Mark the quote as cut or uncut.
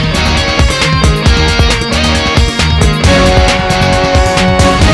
uncut